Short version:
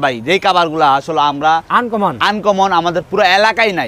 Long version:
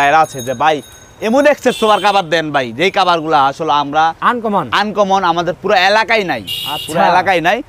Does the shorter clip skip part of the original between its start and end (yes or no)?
no